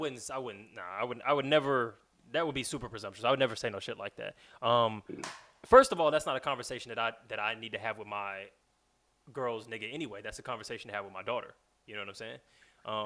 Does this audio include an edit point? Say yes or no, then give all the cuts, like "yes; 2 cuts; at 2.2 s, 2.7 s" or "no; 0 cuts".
no; 0 cuts